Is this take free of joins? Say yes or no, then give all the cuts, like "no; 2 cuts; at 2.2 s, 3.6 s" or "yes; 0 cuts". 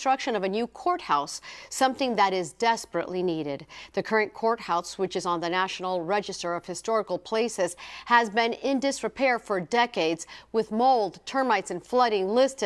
no; 1 cut; at 9.6 s